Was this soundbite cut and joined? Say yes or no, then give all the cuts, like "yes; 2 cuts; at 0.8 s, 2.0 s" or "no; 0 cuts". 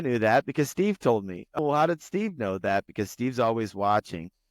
yes; 1 cut; at 1.6 s